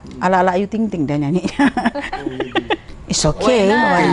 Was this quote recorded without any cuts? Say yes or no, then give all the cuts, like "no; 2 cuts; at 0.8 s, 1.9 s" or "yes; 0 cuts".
no; 1 cut; at 2.9 s